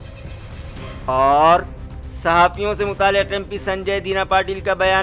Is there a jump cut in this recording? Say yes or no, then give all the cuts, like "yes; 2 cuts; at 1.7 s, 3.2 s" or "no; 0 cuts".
yes; 1 cut; at 0.9 s